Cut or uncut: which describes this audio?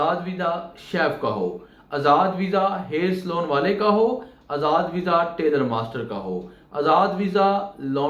uncut